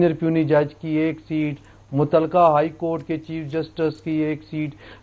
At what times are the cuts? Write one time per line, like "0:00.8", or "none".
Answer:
none